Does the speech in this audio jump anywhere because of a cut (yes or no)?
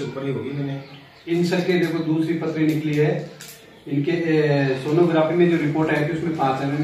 no